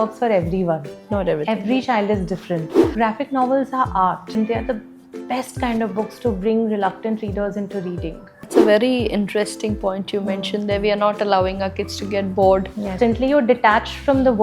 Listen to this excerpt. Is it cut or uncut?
cut